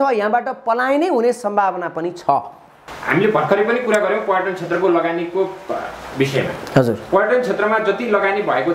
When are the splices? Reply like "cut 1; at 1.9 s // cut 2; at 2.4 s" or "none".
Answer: none